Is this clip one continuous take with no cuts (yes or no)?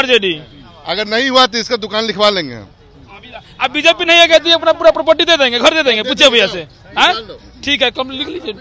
yes